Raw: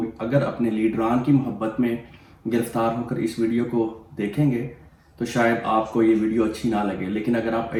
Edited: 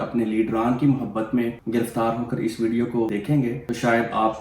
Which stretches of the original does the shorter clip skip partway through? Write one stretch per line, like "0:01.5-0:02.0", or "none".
0:02.0-0:02.4
0:04.0-0:04.8